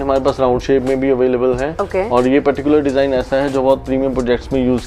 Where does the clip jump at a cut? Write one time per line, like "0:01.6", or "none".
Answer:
none